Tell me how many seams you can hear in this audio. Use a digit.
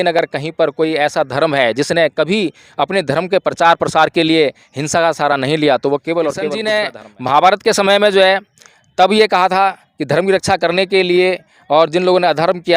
1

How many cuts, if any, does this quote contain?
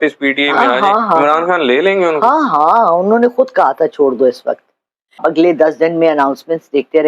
1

